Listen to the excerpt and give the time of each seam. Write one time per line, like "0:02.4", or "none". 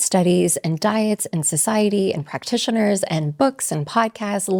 none